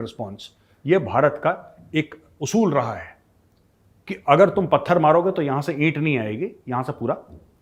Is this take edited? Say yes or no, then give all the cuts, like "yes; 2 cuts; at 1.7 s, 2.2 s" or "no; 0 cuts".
no; 0 cuts